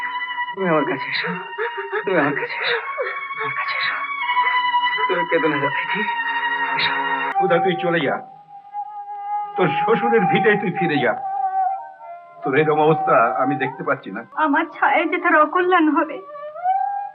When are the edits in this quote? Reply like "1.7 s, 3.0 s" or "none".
7.3 s, 14.2 s

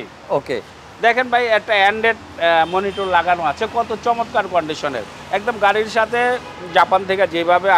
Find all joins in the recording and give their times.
none

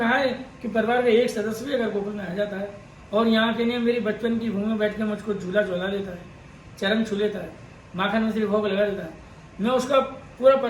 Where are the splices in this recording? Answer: none

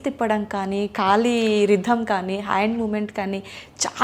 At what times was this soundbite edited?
none

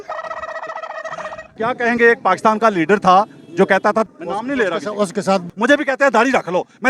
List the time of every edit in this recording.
1.5 s, 4.1 s, 5.5 s

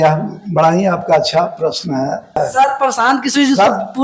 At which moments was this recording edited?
2.4 s

